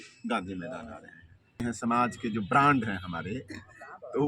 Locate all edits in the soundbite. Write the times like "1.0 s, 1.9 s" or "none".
1.6 s